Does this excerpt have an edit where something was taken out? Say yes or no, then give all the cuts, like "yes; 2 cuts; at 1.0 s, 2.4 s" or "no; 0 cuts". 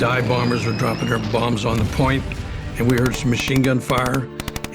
yes; 1 cut; at 1.2 s